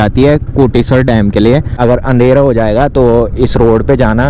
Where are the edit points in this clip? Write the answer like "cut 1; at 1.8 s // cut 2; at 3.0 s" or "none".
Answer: cut 1; at 1.8 s